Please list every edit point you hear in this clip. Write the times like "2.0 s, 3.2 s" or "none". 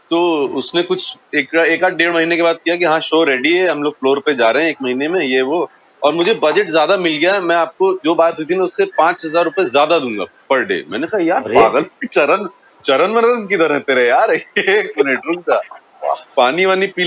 none